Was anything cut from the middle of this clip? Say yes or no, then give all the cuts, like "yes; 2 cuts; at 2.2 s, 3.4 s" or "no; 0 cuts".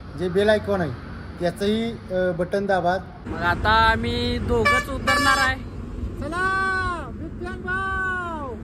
yes; 1 cut; at 3.2 s